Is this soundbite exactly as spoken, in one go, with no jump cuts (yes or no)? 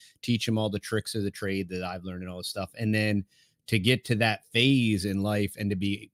yes